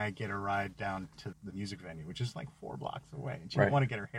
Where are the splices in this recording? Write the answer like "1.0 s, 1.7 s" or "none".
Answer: 1.3 s